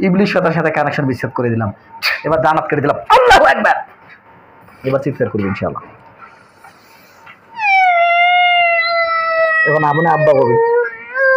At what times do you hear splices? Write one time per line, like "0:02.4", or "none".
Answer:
0:07.6